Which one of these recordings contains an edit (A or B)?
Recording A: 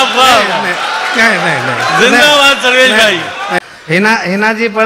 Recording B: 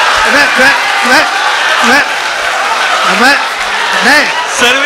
A